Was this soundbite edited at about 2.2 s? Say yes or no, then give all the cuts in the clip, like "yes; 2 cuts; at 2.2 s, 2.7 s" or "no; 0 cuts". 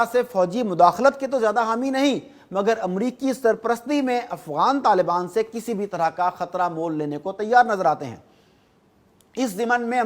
no; 0 cuts